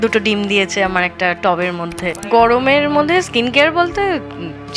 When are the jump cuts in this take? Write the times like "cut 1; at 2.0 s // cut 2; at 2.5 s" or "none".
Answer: cut 1; at 2.2 s